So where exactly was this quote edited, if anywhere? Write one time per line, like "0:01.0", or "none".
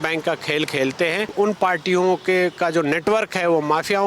0:01.3